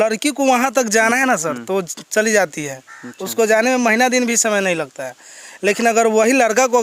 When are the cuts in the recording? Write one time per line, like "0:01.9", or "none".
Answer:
none